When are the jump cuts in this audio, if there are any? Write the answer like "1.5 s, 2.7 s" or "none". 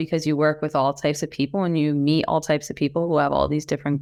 none